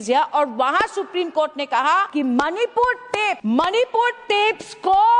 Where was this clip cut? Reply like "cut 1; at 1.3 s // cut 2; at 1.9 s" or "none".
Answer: cut 1; at 2.1 s // cut 2; at 3.4 s

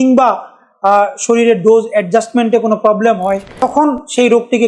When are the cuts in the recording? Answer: cut 1; at 3.5 s

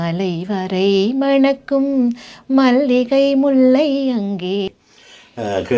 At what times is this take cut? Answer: cut 1; at 4.7 s

